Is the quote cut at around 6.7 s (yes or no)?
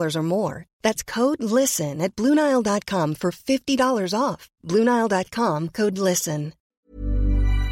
yes